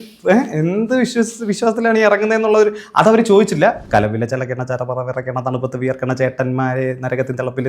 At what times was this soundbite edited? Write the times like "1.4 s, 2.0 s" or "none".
3.8 s